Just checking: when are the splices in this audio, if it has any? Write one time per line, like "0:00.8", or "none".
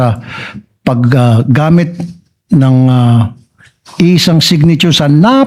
none